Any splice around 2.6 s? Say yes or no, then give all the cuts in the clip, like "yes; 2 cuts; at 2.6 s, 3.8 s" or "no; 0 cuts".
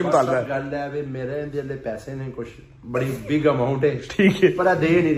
no; 0 cuts